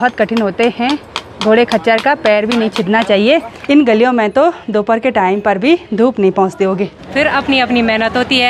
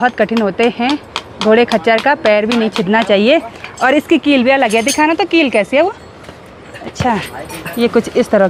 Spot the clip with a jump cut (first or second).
first